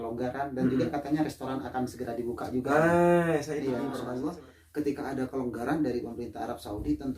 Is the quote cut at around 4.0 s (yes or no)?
yes